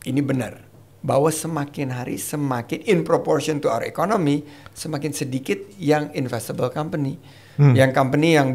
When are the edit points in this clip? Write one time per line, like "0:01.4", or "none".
none